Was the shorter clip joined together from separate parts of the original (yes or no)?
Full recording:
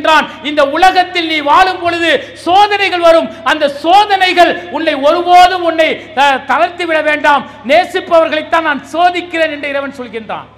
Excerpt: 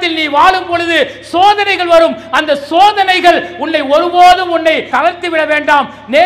yes